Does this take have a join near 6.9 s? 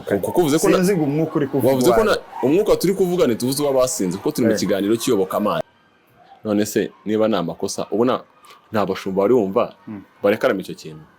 no; 1 cut; at 5.6 s

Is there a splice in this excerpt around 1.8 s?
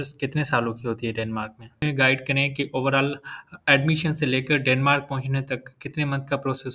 yes; 1 cut; at 1.8 s

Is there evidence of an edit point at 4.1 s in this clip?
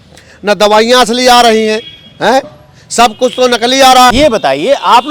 yes; 1 cut; at 4.1 s

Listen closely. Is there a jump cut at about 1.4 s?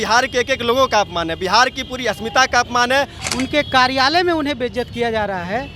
no; 1 cut; at 3.2 s

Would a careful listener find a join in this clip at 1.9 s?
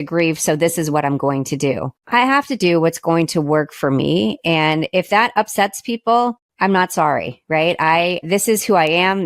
yes; 3 cuts; at 1.9 s, 6.4 s, 8.2 s

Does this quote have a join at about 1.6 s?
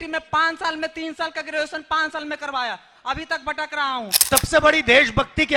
no; 1 cut; at 4.3 s

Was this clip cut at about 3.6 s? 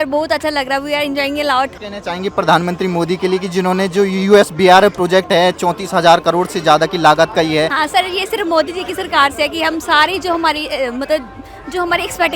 no; 2 cuts; at 1.7 s, 7.8 s

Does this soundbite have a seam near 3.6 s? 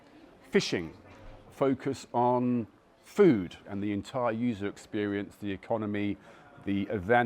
yes; 1 cut; at 3.6 s

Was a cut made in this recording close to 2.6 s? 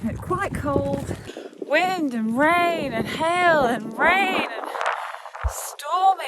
no; 1 cut; at 1.3 s

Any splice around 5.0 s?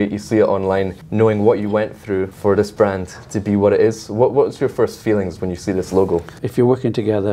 no; 3 cuts; at 1.0 s, 2.3 s, 6.4 s

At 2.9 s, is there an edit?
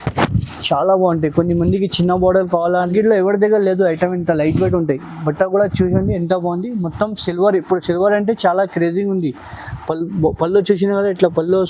yes; 1 cut; at 2.9 s

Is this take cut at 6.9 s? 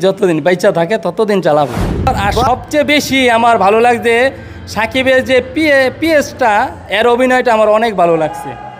no; 1 cut; at 2.3 s

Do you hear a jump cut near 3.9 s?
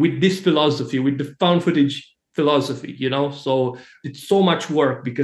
yes; 1 cut; at 3.9 s

